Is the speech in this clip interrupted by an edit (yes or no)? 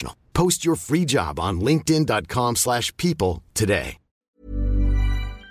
yes